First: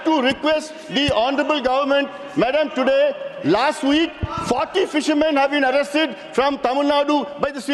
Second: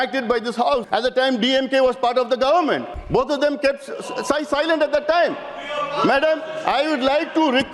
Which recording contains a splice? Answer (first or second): second